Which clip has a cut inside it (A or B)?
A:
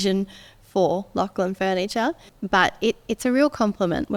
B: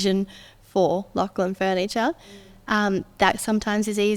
A